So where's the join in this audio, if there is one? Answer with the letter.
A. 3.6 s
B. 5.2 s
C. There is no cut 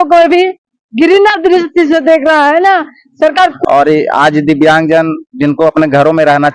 A